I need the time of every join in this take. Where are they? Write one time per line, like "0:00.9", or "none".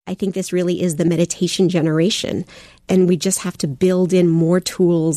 0:01.1
0:02.8